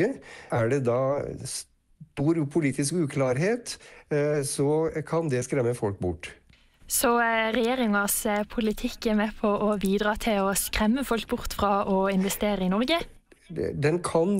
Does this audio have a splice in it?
no; 0 cuts

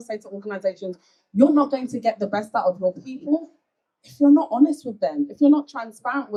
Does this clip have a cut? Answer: no; 0 cuts

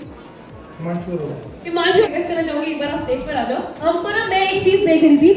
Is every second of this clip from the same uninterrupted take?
yes; 0 cuts

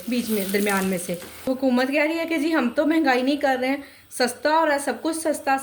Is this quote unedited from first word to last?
no; 1 cut; at 1.5 s

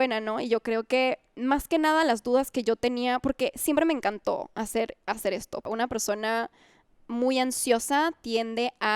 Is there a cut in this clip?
yes; 1 cut; at 5.7 s

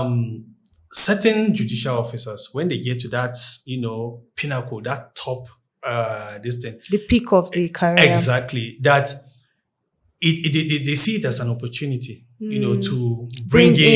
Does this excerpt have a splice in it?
no; 0 cuts

